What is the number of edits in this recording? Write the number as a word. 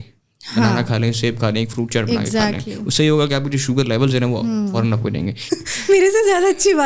one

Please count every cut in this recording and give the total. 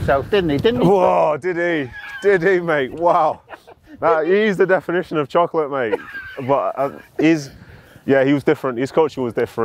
zero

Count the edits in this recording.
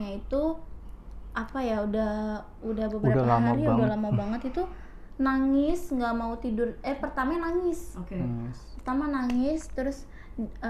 zero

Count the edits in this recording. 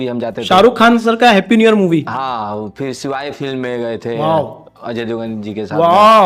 zero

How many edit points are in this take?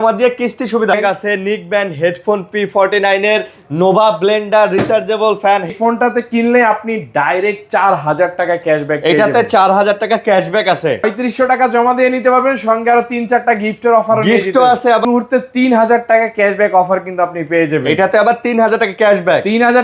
four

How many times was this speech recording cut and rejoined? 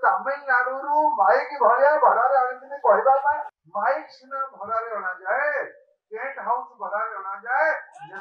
one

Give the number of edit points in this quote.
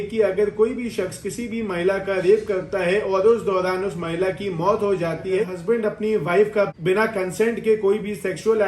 one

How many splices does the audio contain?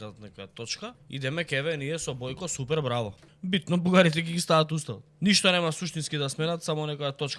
three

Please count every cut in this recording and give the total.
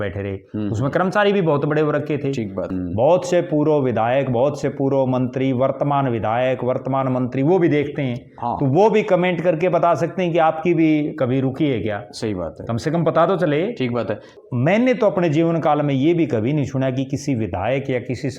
two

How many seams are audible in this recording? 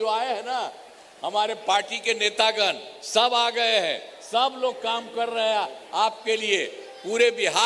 zero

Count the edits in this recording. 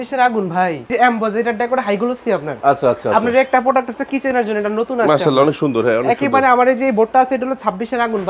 one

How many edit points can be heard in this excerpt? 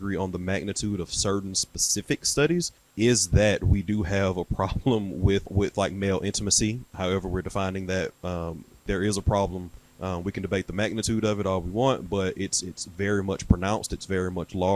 three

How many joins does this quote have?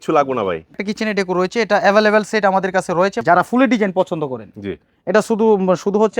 two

